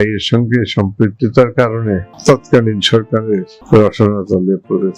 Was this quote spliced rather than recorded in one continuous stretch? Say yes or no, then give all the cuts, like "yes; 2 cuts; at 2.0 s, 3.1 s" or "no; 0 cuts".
yes; 2 cuts; at 2.1 s, 3.5 s